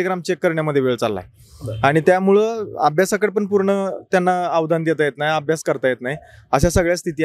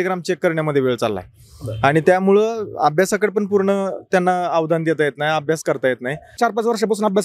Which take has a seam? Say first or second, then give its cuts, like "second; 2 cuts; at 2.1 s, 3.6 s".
second; 1 cut; at 6.3 s